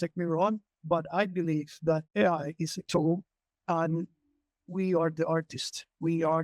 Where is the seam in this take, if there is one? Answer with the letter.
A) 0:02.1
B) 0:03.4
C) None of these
A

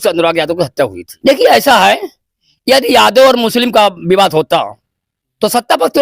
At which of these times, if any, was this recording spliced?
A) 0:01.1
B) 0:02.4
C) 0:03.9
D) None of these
A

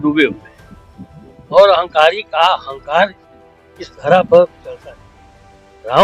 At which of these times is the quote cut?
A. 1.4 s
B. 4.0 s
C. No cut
C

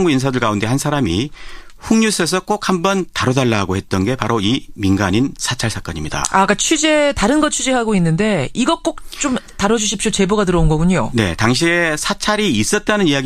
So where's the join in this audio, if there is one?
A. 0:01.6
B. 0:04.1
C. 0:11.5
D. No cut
B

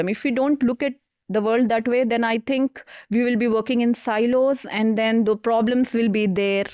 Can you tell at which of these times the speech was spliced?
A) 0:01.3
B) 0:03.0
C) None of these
C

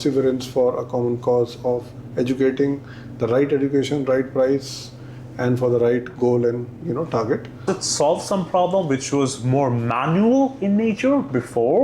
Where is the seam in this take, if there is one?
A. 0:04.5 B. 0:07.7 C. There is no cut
B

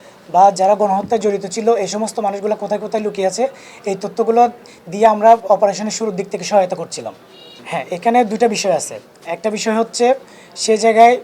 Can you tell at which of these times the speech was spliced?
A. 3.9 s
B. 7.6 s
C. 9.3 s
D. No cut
D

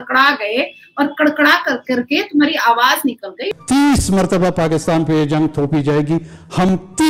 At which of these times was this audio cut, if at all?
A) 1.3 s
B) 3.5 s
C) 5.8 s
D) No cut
D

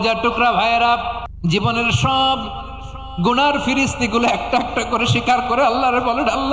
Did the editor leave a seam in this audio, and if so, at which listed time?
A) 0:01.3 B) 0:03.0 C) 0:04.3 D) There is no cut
A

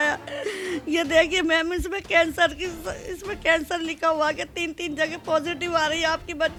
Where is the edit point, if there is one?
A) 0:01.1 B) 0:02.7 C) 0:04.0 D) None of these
D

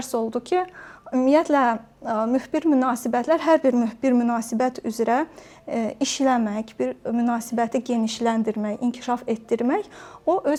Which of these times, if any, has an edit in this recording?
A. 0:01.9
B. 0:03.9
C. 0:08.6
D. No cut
D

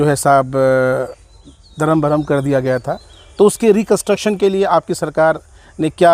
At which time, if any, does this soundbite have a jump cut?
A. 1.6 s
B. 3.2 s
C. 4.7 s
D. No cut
D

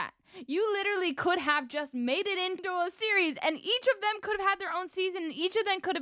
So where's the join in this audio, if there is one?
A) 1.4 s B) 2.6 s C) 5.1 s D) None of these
B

